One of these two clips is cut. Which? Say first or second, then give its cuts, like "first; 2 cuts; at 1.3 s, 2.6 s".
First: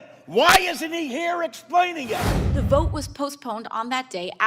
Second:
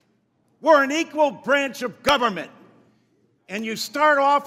first; 1 cut; at 2.4 s